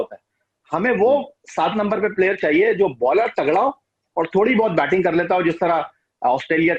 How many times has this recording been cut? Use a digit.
0